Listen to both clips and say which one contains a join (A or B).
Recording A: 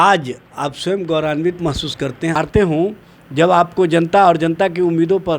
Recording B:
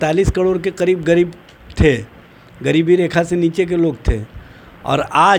A